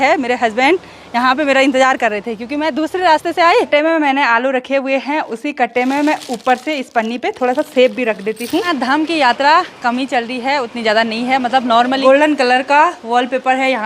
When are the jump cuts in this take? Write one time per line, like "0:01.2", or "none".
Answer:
0:03.7
0:08.7
0:12.0